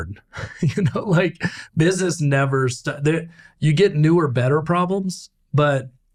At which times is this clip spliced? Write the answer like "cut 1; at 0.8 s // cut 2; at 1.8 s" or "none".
none